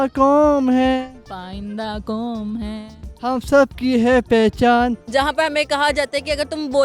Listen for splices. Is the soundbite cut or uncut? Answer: cut